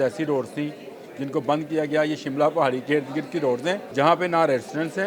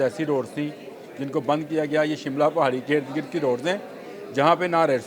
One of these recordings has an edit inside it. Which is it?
first; 1 cut; at 3.9 s

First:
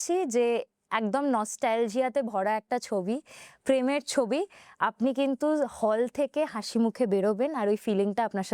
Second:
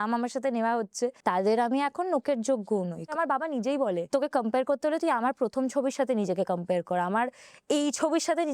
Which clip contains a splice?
second; 3 cuts; at 1.2 s, 3.1 s, 4.1 s

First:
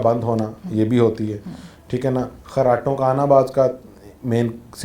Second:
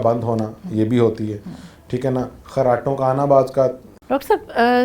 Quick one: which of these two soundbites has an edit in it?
second; 1 cut; at 3.9 s

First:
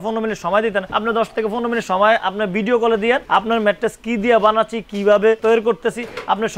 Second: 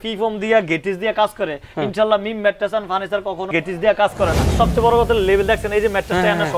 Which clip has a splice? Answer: second; 1 cut; at 4.4 s

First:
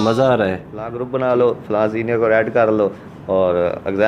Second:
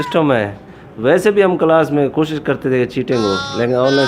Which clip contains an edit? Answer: first; 1 cut; at 1.0 s

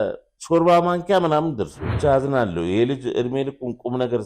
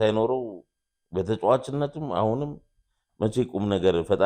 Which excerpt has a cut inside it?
first; 1 cut; at 1.8 s

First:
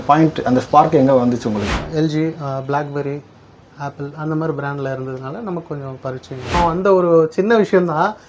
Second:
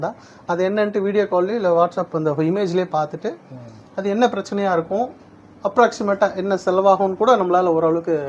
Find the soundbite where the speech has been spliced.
first; 2 cuts; at 1.7 s, 6.5 s

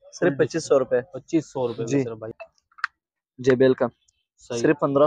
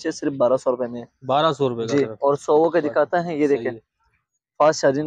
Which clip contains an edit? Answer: first; 1 cut; at 2.3 s

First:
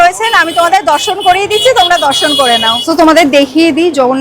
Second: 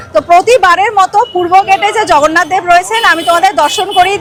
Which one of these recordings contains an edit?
first; 1 cut; at 2.8 s

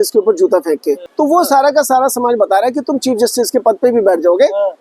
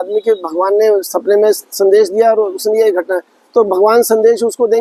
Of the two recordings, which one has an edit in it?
first; 1 cut; at 1.1 s

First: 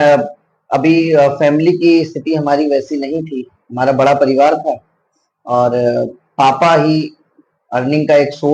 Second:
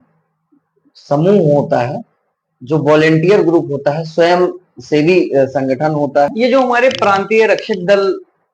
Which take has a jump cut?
second; 1 cut; at 6.3 s

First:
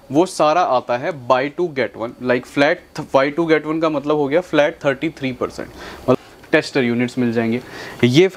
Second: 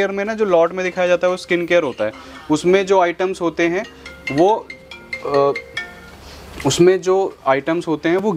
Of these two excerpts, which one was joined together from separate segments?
first; 1 cut; at 6.2 s

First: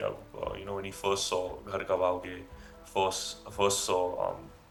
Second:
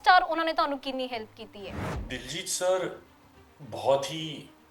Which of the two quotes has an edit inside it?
second; 1 cut; at 1.9 s

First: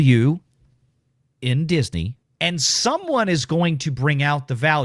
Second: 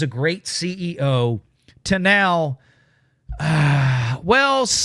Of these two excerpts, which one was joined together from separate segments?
first; 1 cut; at 2.2 s

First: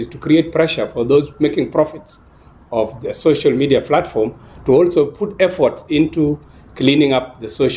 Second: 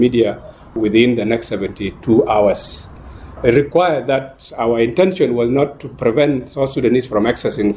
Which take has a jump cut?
second; 2 cuts; at 0.8 s, 3.2 s

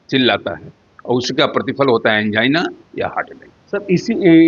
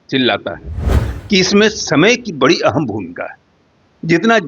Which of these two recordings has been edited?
second; 1 cut; at 0.9 s

